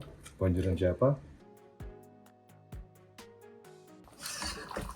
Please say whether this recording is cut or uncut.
cut